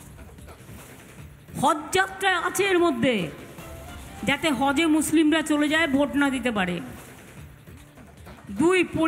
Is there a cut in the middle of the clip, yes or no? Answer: yes